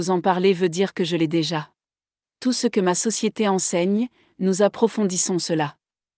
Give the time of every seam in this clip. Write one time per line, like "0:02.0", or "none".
0:02.2